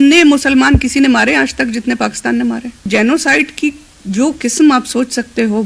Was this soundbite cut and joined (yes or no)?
yes